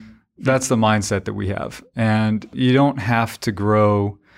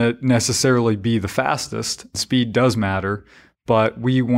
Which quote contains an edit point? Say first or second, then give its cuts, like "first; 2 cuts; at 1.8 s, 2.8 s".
second; 1 cut; at 2.2 s